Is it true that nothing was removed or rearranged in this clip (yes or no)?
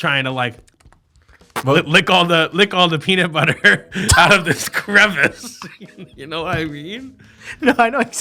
yes